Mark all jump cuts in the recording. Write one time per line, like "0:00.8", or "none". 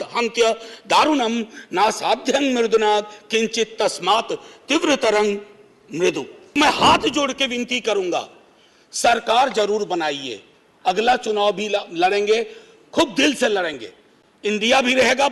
0:06.6